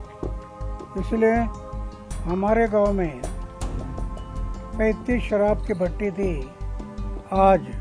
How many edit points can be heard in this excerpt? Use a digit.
1